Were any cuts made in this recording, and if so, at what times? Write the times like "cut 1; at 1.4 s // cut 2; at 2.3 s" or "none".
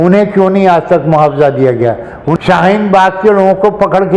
cut 1; at 2.3 s